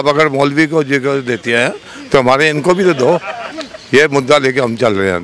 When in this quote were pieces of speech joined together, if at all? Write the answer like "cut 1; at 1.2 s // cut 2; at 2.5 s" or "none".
none